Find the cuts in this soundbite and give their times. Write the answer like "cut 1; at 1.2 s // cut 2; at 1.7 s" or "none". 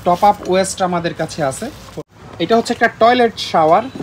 cut 1; at 2.0 s